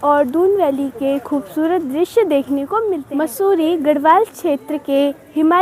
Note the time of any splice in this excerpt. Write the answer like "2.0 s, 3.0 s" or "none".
3.0 s